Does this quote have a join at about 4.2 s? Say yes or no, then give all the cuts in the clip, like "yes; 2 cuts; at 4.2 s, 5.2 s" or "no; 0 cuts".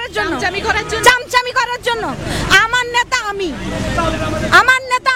yes; 1 cut; at 4.2 s